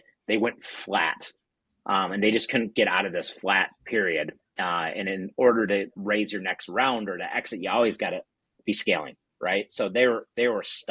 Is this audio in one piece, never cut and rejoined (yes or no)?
yes